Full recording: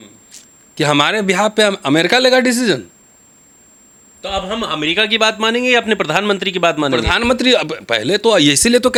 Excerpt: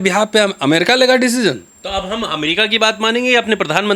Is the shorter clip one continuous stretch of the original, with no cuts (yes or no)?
no